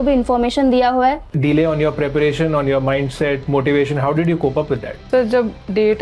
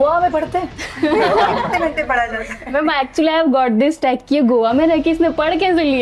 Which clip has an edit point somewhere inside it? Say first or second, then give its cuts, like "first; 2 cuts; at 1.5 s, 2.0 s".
first; 2 cuts; at 1.3 s, 5.1 s